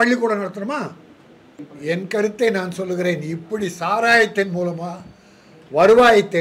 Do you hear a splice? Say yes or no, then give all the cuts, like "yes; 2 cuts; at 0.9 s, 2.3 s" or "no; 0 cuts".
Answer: yes; 1 cut; at 1.7 s